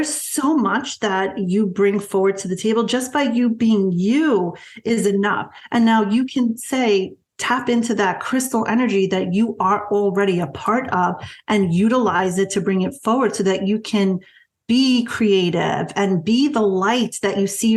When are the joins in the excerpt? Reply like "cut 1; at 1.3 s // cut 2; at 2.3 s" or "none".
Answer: none

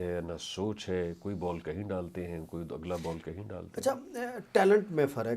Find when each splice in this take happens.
none

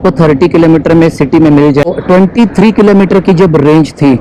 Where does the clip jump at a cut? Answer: cut 1; at 1.8 s

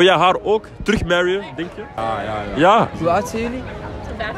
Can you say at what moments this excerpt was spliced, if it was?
cut 1; at 1.9 s // cut 2; at 2.9 s

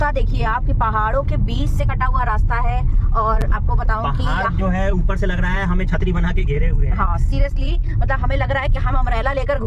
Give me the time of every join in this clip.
none

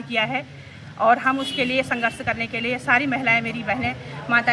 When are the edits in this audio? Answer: none

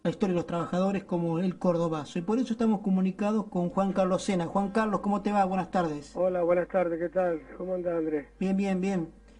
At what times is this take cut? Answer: none

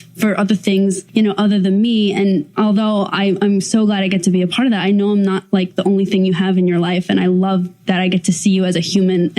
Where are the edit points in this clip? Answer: cut 1; at 1.0 s // cut 2; at 2.5 s

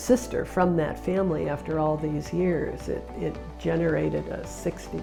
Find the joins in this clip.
none

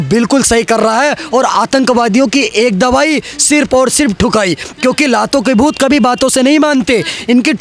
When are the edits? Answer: none

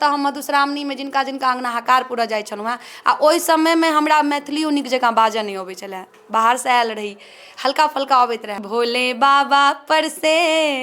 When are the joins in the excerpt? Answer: cut 1; at 8.6 s

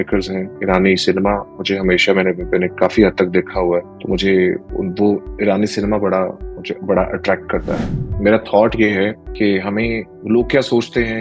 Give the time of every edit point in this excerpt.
cut 1; at 3.9 s // cut 2; at 7.8 s // cut 3; at 9.2 s // cut 4; at 10.1 s

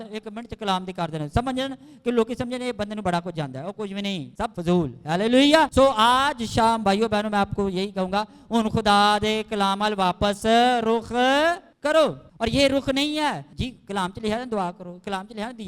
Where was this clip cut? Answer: cut 1; at 4.4 s // cut 2; at 5.7 s // cut 3; at 11.7 s // cut 4; at 12.2 s // cut 5; at 13.5 s

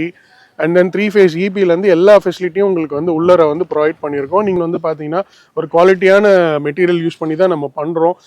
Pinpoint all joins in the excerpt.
cut 1; at 4.6 s

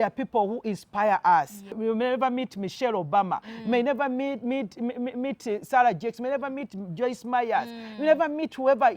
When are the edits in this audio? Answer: cut 1; at 1.7 s

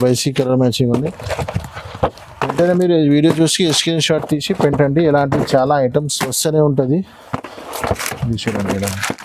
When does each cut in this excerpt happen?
none

